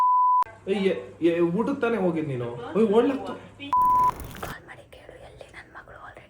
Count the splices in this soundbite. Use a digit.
1